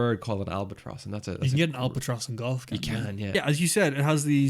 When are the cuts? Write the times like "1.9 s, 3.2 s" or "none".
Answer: 3.2 s